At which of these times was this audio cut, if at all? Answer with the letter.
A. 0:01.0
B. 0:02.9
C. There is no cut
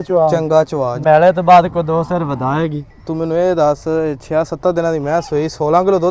A